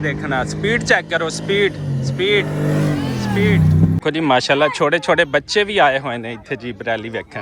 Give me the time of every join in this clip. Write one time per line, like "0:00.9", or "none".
0:04.0